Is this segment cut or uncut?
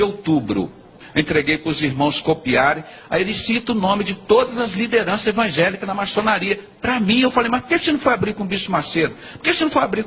cut